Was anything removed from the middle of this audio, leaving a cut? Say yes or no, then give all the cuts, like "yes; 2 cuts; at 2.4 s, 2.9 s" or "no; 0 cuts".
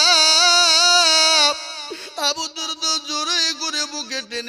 no; 0 cuts